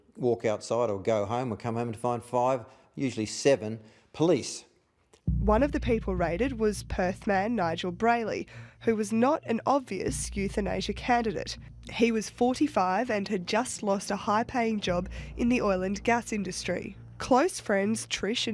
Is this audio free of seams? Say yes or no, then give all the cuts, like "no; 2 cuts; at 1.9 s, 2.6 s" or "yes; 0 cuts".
yes; 0 cuts